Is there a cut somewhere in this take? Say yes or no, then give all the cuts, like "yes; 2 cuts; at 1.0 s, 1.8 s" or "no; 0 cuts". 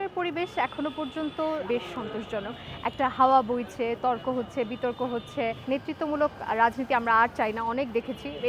yes; 2 cuts; at 1.6 s, 5.6 s